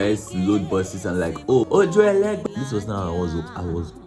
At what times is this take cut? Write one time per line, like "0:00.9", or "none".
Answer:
0:01.7
0:02.4